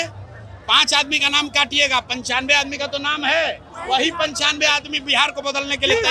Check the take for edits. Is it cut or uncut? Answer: uncut